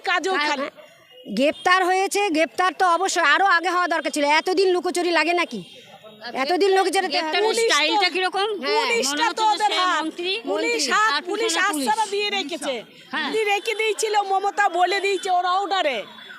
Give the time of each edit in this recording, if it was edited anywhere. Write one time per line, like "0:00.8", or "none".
none